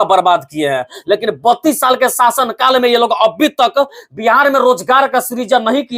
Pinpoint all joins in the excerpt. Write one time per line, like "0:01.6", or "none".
none